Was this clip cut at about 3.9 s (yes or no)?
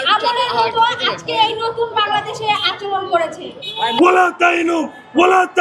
yes